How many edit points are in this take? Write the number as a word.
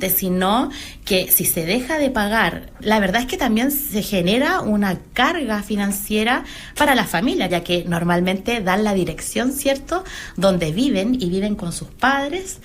two